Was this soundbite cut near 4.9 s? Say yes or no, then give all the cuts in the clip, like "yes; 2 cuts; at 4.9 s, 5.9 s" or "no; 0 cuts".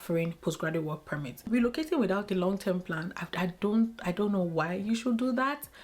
no; 1 cut; at 1.4 s